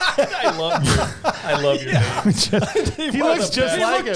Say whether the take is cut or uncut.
uncut